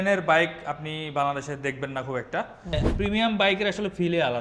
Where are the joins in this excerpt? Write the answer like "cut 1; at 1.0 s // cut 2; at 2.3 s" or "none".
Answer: cut 1; at 2.7 s